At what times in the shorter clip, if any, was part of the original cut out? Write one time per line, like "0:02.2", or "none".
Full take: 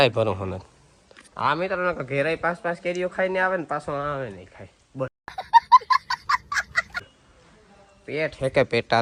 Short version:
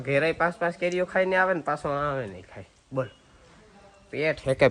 0:03.2